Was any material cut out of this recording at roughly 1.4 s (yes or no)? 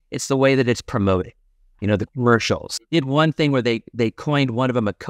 no